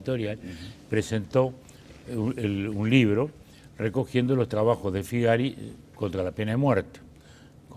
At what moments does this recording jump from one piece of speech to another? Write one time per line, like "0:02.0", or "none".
0:06.6